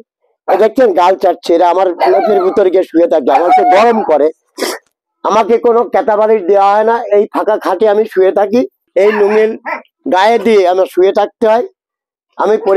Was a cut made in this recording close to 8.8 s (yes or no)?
yes